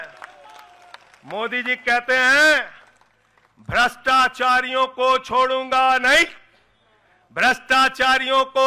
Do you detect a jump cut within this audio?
no; 0 cuts

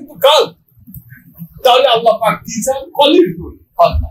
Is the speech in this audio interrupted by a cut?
no; 0 cuts

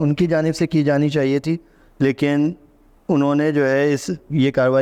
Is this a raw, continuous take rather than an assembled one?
yes; 0 cuts

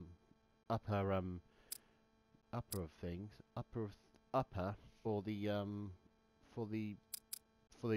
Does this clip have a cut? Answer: no; 0 cuts

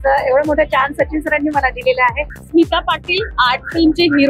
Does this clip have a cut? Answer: yes; 1 cut; at 2.3 s

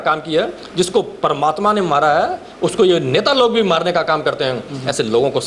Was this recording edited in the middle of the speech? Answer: no; 0 cuts

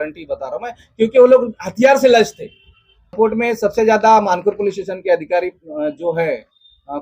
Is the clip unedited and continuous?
no; 1 cut; at 3.1 s

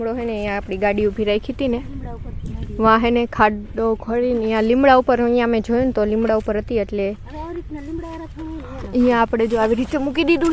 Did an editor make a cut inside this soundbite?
no; 0 cuts

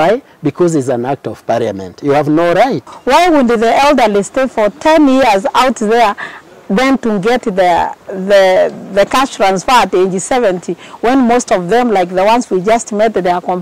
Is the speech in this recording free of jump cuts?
no; 1 cut; at 2.9 s

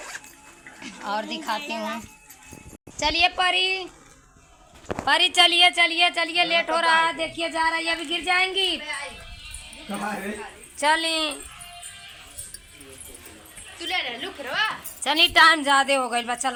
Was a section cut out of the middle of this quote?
no; 0 cuts

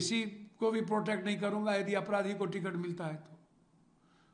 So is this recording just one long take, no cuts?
yes; 0 cuts

